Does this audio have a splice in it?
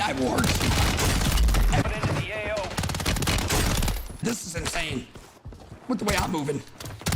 yes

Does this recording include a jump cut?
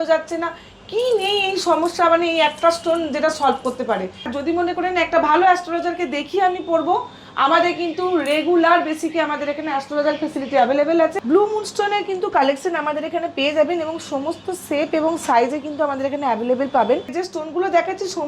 yes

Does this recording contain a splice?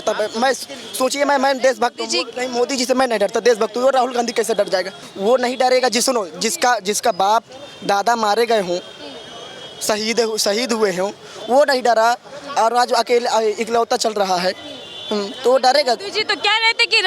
no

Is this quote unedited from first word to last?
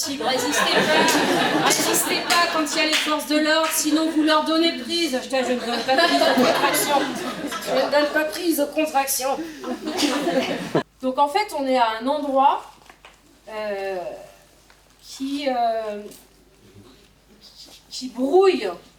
no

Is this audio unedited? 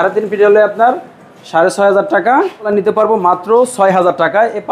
no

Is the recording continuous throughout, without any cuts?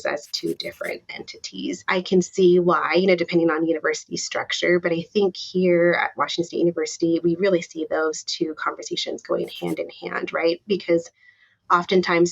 no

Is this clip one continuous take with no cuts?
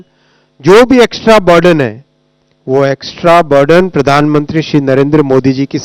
yes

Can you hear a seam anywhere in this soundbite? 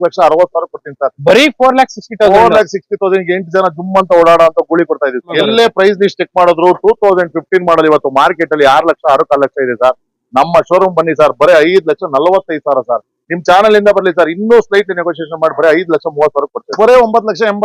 yes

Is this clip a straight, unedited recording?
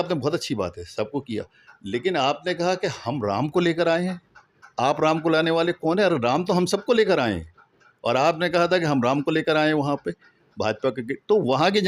yes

